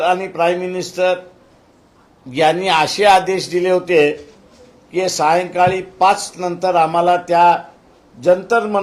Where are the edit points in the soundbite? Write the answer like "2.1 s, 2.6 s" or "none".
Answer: none